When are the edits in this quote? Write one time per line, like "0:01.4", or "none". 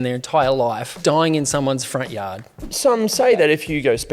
0:01.0
0:02.7